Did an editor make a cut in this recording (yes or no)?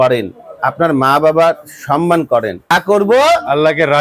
yes